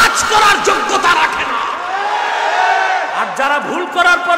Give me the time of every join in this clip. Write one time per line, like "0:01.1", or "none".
0:03.2